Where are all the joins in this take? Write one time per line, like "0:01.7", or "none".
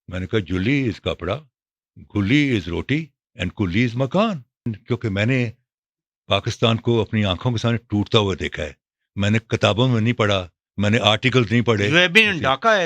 0:04.7